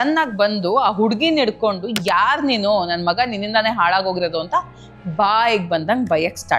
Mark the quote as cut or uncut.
uncut